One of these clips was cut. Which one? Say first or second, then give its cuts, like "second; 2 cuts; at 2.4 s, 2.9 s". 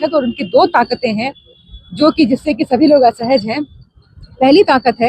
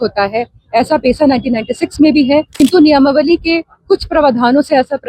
second; 1 cut; at 2.5 s